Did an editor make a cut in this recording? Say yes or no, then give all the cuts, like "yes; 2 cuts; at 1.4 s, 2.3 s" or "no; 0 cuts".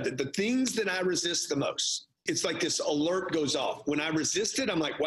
yes; 1 cut; at 2.2 s